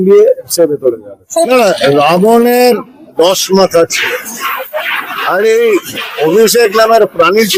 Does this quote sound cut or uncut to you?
uncut